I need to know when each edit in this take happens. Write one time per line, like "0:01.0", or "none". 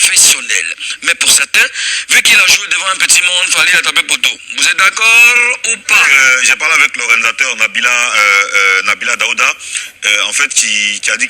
0:06.1